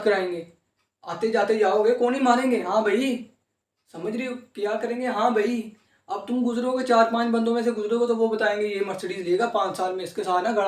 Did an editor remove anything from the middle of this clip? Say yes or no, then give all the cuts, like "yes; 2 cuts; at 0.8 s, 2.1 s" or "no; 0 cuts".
no; 0 cuts